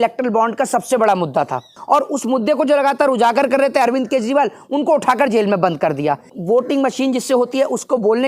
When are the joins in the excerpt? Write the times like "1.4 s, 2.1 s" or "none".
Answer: 1.7 s, 6.3 s